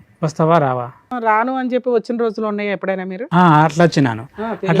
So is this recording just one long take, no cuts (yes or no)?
no